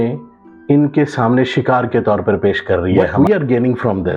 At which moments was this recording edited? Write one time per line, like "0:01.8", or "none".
0:03.1